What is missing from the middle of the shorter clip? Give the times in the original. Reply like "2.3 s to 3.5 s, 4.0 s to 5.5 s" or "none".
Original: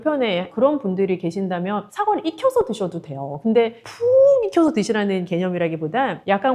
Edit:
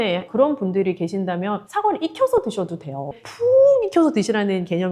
3.4 s to 3.7 s